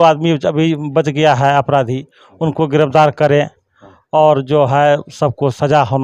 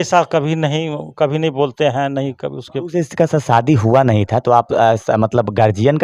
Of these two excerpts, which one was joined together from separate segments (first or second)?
second